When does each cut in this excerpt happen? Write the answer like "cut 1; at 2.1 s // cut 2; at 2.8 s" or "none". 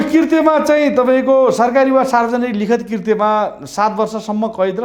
none

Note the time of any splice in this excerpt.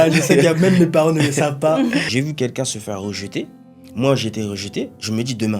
cut 1; at 2.1 s

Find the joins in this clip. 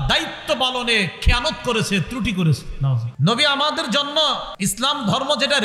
cut 1; at 3.1 s // cut 2; at 4.5 s

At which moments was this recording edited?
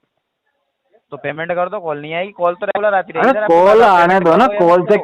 none

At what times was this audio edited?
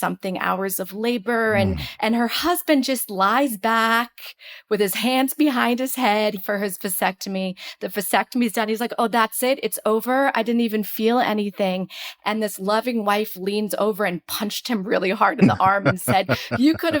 cut 1; at 1.8 s // cut 2; at 6.4 s

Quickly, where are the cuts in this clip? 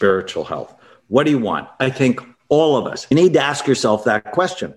cut 1; at 3.1 s

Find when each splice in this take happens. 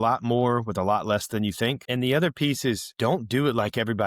cut 1; at 1.8 s // cut 2; at 2.9 s

